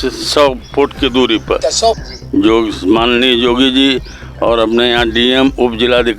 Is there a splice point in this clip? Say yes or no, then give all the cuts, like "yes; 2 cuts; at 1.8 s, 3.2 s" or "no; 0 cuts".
yes; 1 cut; at 1.7 s